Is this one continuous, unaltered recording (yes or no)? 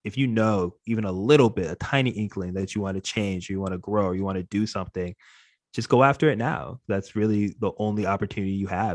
yes